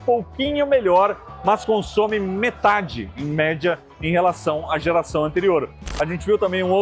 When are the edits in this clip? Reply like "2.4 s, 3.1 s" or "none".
5.8 s